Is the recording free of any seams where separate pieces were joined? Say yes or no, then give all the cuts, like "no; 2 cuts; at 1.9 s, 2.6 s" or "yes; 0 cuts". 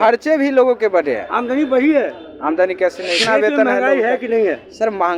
no; 1 cut; at 3.2 s